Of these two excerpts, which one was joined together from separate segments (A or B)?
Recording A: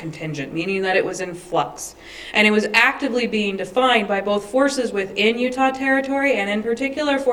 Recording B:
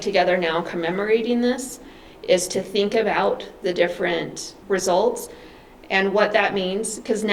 B